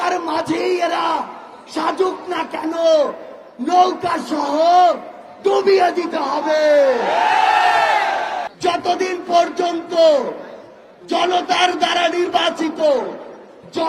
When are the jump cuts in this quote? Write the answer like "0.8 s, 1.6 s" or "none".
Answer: 8.5 s